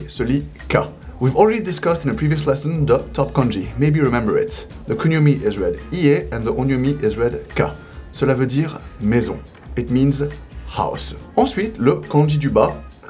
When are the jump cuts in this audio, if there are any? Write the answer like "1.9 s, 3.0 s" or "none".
1.0 s, 11.1 s